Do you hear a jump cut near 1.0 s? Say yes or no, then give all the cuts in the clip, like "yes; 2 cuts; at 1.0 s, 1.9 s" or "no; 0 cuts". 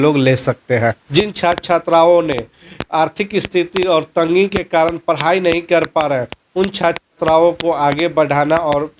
yes; 1 cut; at 1.0 s